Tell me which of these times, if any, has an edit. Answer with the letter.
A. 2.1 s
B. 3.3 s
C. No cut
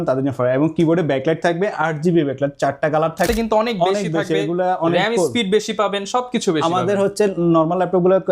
B